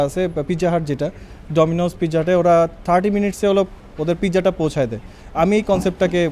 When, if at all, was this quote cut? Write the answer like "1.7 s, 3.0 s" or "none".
none